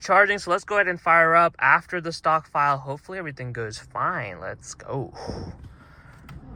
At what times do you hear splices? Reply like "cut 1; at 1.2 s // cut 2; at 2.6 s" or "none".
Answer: none